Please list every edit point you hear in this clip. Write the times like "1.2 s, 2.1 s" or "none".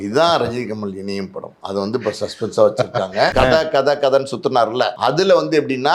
3.3 s, 4.9 s